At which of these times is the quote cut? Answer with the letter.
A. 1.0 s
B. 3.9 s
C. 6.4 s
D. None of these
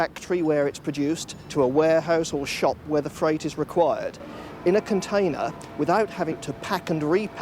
C